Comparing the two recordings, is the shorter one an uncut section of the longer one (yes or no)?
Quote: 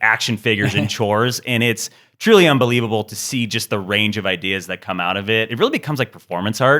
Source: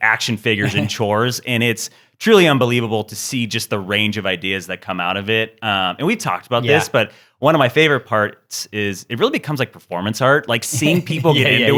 no